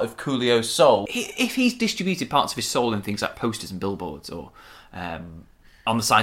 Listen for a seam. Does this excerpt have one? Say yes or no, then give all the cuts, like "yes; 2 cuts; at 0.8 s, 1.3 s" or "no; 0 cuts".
yes; 1 cut; at 1.1 s